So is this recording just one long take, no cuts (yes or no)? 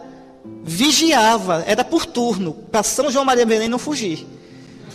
yes